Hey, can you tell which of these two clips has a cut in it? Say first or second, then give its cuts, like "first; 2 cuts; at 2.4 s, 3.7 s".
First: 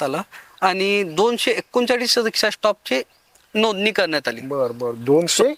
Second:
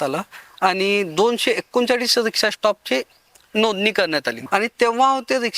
second; 1 cut; at 4.4 s